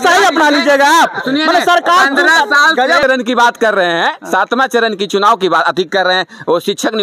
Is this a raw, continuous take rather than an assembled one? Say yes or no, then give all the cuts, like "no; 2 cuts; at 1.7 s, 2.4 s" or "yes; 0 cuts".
no; 1 cut; at 3.0 s